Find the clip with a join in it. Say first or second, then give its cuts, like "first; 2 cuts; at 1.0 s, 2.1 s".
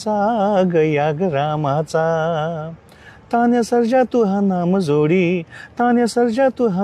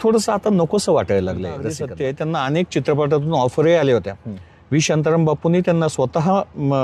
second; 1 cut; at 1.8 s